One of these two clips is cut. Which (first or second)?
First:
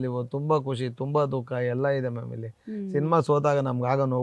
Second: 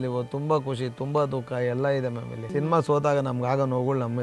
second